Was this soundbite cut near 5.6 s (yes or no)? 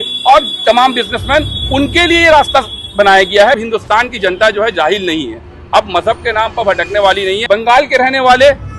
no